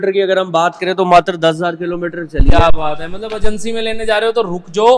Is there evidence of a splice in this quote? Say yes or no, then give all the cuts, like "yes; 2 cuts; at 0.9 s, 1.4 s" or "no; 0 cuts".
no; 0 cuts